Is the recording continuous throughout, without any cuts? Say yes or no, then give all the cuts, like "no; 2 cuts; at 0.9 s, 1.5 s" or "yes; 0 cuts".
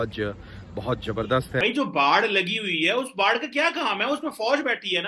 no; 1 cut; at 1.6 s